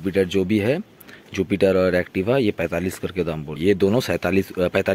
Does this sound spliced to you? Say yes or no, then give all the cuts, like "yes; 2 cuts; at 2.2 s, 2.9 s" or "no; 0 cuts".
yes; 1 cut; at 3.5 s